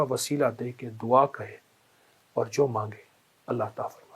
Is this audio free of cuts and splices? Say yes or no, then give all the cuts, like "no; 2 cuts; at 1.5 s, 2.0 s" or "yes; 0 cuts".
yes; 0 cuts